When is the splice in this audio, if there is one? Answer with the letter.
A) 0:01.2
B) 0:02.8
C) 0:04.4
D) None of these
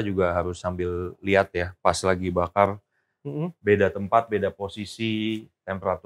D